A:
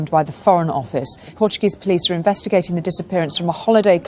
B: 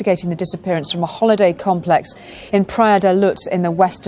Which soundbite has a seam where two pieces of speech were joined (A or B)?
A